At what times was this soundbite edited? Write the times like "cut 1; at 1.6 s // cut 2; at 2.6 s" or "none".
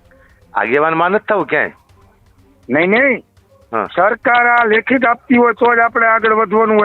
none